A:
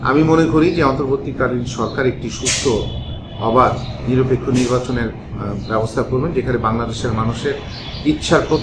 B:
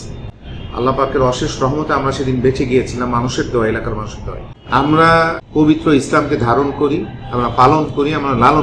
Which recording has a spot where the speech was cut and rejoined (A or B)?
B